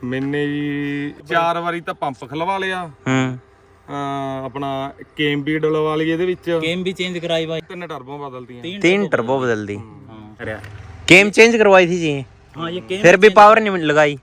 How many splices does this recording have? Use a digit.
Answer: 3